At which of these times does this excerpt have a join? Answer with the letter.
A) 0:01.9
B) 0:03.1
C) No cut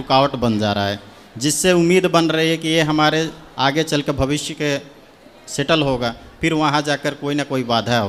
C